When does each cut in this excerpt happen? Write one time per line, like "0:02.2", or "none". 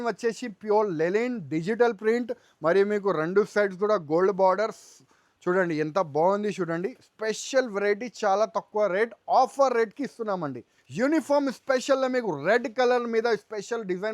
0:10.8